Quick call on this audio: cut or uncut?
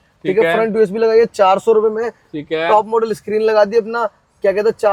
uncut